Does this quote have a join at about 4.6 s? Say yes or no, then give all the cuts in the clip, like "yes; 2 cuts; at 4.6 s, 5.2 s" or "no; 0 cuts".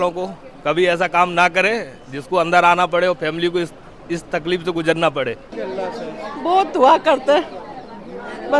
no; 1 cut; at 6.0 s